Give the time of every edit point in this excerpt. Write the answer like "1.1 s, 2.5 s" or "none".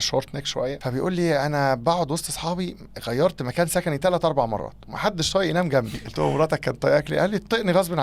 0.8 s, 6.0 s

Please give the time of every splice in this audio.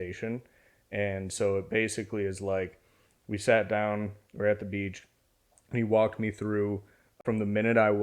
7.1 s

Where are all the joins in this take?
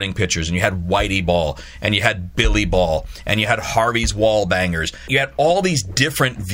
5.0 s

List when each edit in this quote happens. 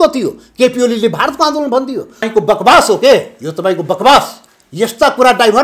2.2 s

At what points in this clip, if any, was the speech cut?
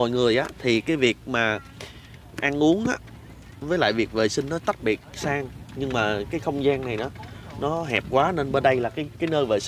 none

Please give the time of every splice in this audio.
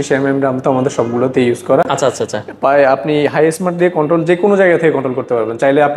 none

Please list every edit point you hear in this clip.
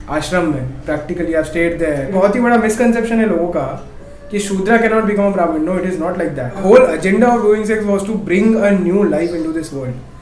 2.1 s, 6.6 s

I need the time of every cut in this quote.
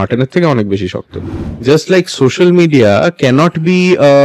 1.6 s

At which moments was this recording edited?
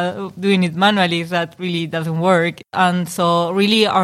2.6 s

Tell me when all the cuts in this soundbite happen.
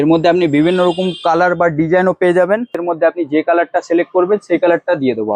2.8 s

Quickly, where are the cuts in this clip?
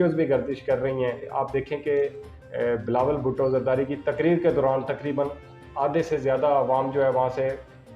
1.3 s

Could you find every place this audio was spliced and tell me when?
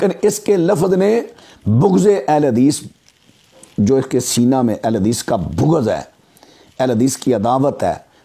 none

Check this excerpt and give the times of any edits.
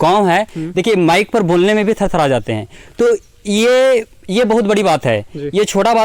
none

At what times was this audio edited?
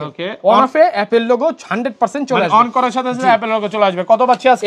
none

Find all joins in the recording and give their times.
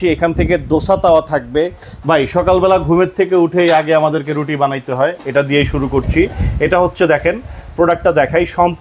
1.9 s

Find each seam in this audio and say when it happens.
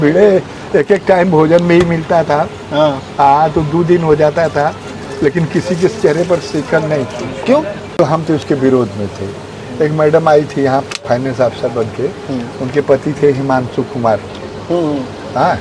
8.0 s

